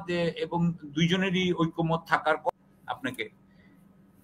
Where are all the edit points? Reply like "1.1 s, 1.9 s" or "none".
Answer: 2.5 s